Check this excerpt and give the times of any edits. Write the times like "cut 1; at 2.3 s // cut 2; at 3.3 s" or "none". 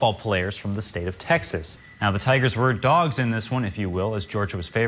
cut 1; at 1.8 s